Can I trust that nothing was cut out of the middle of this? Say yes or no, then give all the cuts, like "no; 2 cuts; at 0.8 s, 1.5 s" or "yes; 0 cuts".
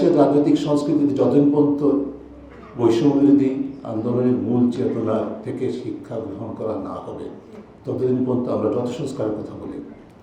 yes; 0 cuts